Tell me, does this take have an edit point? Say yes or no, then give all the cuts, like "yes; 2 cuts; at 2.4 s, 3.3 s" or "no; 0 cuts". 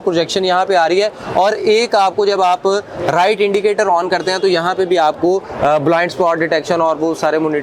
no; 0 cuts